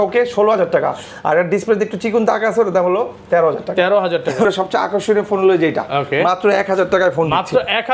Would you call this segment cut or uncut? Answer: cut